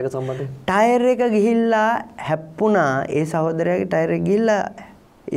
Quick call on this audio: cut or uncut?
uncut